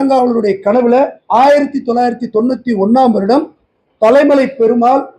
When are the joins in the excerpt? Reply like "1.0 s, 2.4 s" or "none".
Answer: none